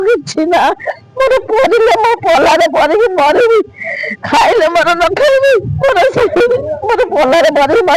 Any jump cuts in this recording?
no; 0 cuts

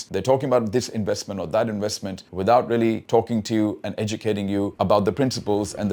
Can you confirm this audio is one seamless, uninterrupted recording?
yes; 0 cuts

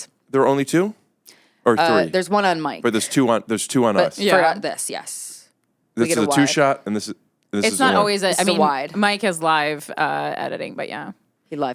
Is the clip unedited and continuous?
yes; 0 cuts

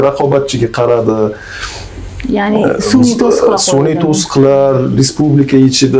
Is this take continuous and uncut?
yes; 0 cuts

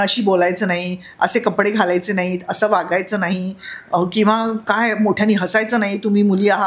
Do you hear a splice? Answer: no; 0 cuts

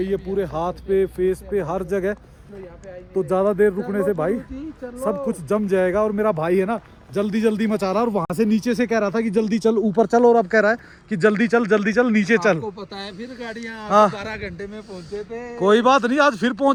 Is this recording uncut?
yes; 0 cuts

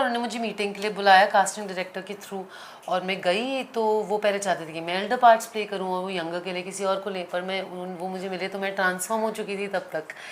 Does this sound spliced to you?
no; 0 cuts

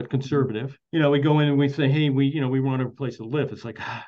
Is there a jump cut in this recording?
no; 0 cuts

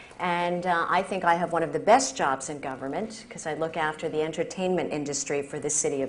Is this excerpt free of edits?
no; 1 cut; at 4.8 s

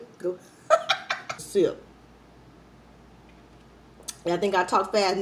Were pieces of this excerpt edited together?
yes; 1 cut; at 1.4 s

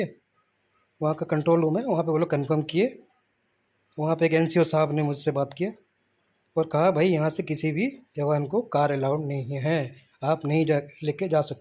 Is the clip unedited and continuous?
yes; 0 cuts

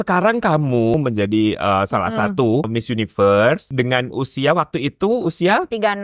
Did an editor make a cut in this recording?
yes; 3 cuts; at 0.9 s, 2.7 s, 3.7 s

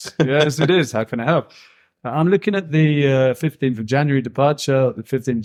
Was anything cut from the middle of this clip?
no; 0 cuts

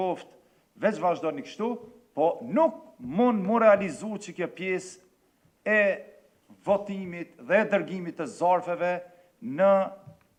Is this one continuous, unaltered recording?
yes; 0 cuts

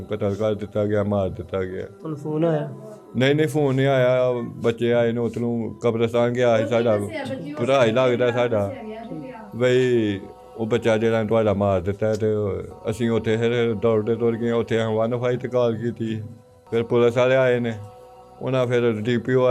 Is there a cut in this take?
no; 0 cuts

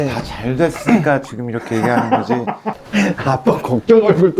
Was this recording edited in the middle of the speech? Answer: yes; 1 cut; at 2.7 s

